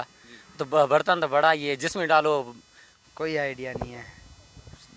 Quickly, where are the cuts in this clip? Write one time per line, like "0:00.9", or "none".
0:02.9

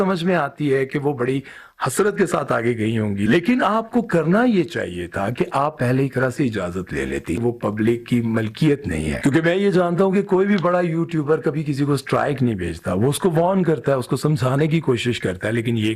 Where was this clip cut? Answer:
0:03.3
0:07.4
0:09.2

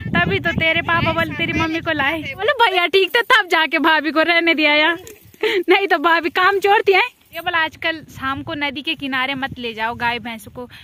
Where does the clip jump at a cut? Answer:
0:02.4
0:07.4

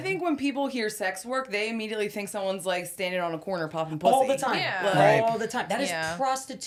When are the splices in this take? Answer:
none

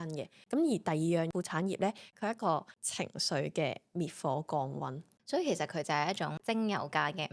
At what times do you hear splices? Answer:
0:05.1
0:06.4

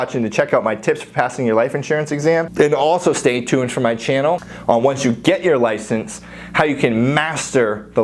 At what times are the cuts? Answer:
0:02.5
0:04.5

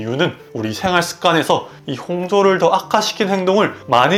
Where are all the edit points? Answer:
none

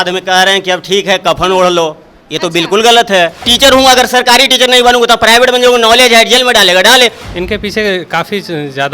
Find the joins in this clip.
0:03.5
0:07.3

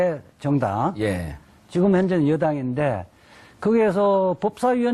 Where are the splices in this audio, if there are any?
none

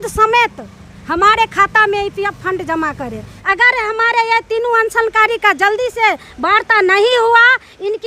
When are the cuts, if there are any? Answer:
0:03.3

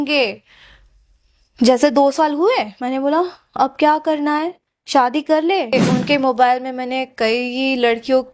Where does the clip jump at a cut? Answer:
0:05.7

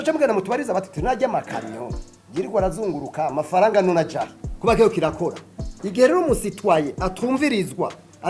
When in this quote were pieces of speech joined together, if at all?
0:04.4

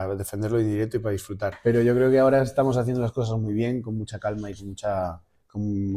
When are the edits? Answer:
0:01.6

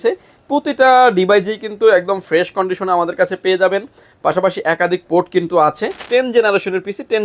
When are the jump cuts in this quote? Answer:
0:06.0

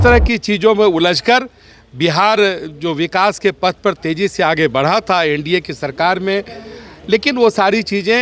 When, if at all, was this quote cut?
none

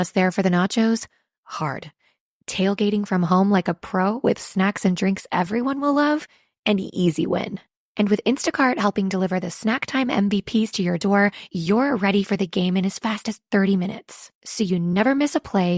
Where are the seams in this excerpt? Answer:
none

